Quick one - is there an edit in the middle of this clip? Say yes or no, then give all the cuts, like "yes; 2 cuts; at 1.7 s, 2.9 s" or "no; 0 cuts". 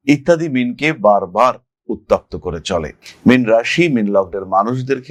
no; 0 cuts